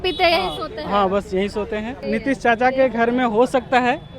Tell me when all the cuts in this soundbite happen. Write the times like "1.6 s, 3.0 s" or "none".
2.0 s